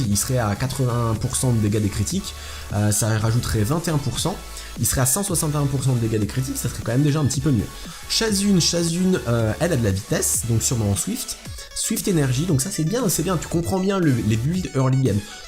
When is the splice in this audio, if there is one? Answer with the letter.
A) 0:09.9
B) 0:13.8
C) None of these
A